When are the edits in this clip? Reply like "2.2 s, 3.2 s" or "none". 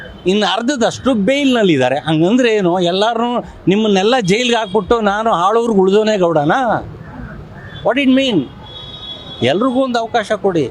none